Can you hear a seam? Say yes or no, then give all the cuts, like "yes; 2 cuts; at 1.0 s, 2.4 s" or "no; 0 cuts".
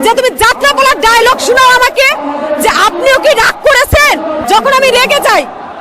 yes; 1 cut; at 4.4 s